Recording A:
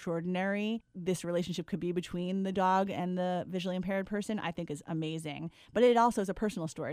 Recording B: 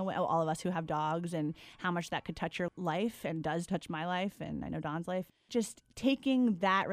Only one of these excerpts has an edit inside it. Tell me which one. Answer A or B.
B